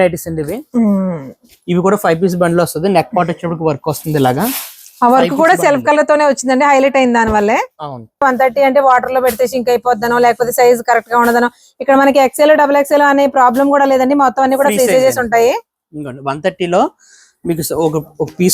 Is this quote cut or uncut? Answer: cut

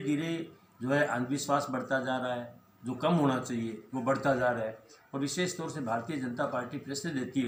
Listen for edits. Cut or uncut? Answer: uncut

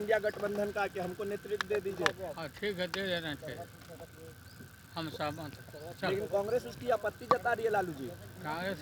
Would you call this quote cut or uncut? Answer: uncut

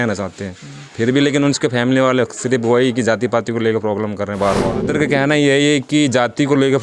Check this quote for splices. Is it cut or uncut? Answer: cut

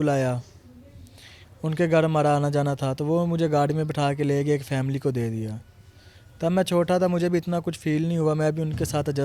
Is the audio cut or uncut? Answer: uncut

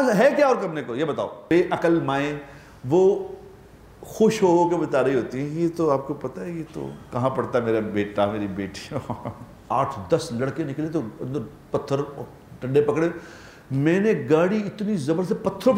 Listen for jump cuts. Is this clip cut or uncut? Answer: cut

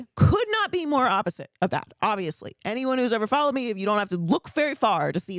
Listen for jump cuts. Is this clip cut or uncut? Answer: uncut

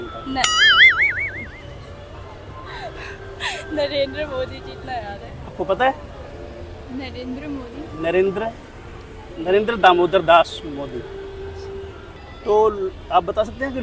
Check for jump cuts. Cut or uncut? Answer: uncut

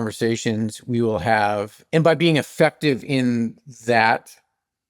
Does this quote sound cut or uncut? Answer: cut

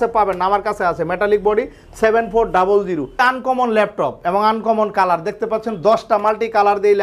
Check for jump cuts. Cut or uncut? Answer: cut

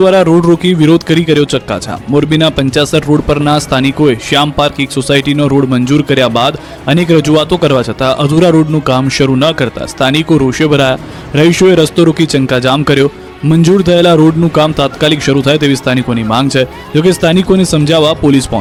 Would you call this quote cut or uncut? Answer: uncut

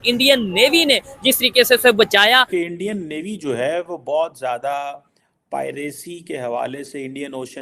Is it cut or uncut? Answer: cut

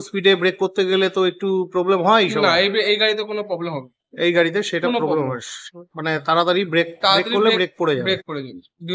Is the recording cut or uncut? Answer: uncut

